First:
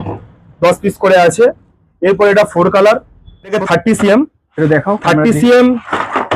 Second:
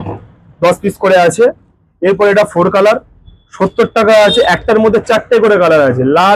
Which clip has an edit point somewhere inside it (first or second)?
first